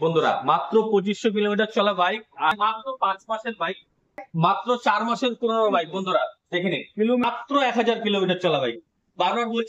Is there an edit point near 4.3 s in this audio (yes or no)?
yes